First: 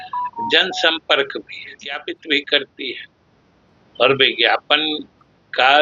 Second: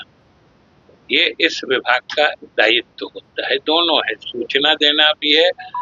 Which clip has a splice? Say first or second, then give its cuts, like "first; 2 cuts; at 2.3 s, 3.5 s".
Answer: first; 1 cut; at 2.1 s